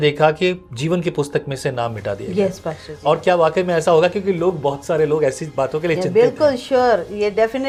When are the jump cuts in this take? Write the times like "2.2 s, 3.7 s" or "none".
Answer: none